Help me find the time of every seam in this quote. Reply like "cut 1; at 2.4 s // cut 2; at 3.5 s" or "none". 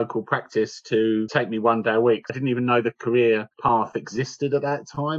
cut 1; at 1.3 s // cut 2; at 2.3 s // cut 3; at 3.5 s